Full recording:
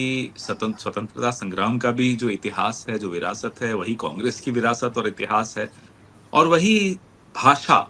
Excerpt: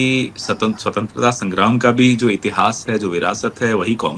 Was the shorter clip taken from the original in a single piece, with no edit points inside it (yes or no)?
yes